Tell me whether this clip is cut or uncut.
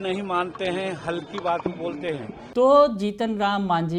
uncut